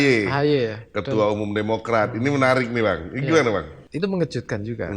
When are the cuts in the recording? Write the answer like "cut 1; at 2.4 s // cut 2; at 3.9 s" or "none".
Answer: cut 1; at 3.8 s